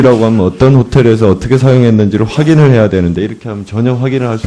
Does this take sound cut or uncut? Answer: cut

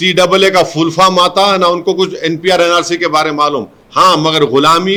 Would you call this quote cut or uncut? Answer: uncut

